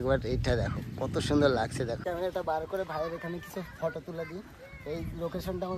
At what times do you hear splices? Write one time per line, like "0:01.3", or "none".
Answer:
0:02.0